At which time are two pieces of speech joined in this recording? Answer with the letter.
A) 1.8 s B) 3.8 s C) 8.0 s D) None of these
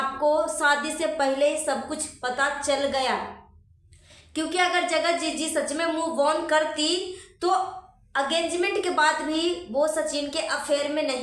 D